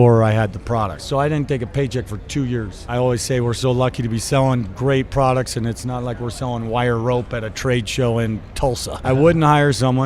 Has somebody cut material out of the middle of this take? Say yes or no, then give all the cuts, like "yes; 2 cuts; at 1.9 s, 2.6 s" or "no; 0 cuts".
yes; 3 cuts; at 1.0 s, 2.8 s, 9.0 s